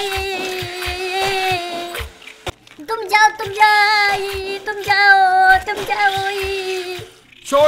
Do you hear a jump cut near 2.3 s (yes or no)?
yes